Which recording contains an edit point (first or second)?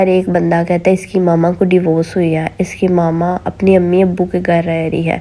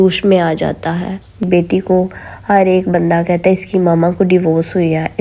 second